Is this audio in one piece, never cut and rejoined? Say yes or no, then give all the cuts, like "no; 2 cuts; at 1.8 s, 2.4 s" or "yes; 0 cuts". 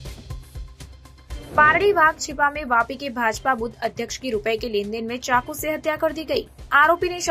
no; 1 cut; at 1.4 s